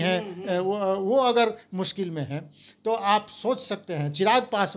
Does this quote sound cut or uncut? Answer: uncut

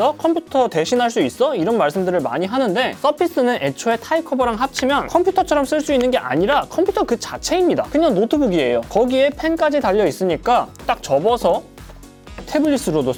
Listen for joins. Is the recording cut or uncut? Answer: uncut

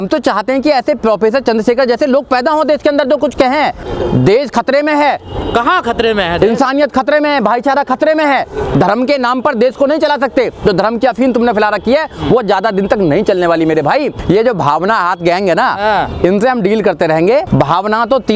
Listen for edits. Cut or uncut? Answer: cut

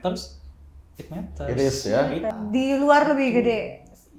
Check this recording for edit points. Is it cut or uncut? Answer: cut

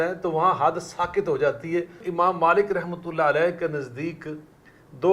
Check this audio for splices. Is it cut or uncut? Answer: cut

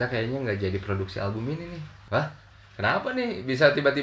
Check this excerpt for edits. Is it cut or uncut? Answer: cut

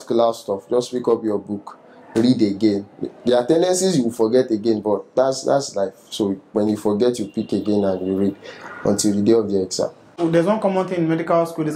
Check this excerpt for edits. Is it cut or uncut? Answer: cut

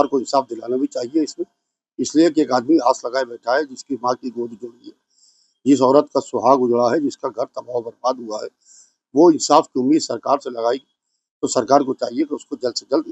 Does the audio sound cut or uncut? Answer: uncut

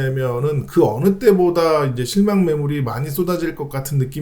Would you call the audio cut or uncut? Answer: uncut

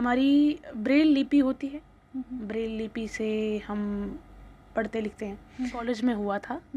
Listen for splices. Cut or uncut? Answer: cut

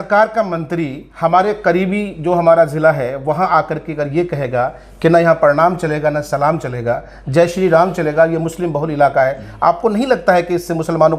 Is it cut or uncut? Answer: uncut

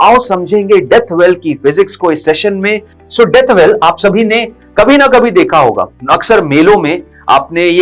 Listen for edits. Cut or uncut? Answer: cut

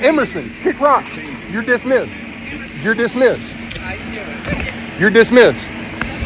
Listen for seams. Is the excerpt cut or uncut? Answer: uncut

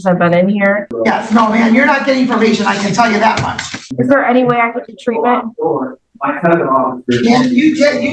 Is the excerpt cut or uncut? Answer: cut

